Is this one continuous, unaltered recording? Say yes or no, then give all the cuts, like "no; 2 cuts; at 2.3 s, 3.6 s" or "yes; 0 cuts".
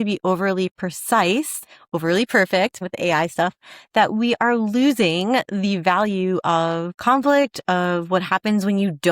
no; 2 cuts; at 2.8 s, 6.9 s